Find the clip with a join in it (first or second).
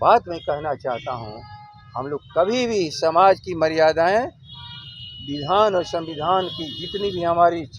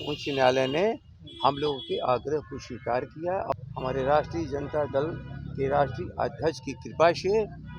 second